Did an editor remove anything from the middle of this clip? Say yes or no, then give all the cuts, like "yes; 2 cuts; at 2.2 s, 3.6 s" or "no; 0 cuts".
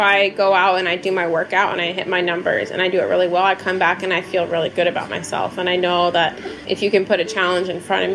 yes; 1 cut; at 6.6 s